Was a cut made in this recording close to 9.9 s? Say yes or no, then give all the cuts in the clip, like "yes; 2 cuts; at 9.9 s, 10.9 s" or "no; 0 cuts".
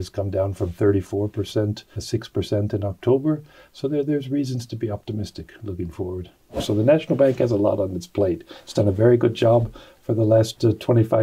no; 2 cuts; at 1.9 s, 6.5 s